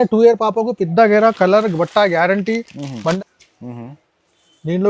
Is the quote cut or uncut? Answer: cut